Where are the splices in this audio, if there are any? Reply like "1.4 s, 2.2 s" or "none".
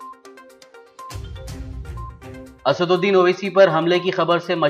1.8 s